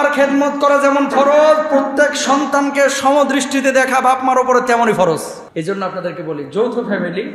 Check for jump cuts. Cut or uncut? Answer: cut